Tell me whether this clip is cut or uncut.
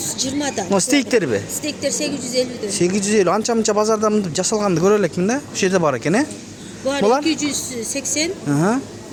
uncut